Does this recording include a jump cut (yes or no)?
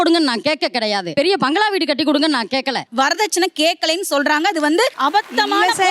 yes